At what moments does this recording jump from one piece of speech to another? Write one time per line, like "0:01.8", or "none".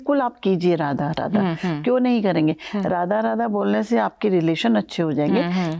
none